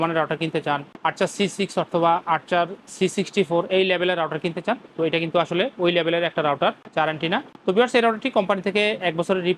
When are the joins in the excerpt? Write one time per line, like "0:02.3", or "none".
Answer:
0:07.5